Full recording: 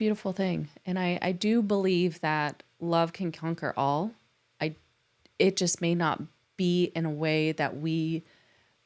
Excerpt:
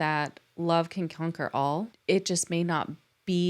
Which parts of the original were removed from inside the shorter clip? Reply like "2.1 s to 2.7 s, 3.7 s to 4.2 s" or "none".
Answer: 4.2 s to 5.3 s